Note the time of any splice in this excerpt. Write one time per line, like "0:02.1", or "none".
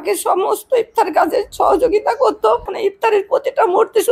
0:01.5
0:02.7